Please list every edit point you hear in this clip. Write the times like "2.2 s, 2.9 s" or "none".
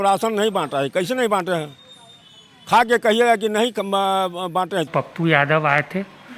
4.9 s